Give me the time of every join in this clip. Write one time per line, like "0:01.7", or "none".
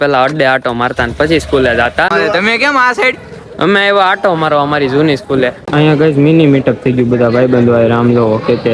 0:02.1
0:05.6